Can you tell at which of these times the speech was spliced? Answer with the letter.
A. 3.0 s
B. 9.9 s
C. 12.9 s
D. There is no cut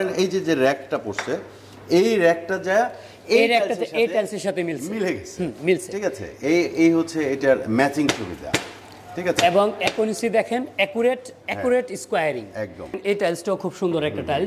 C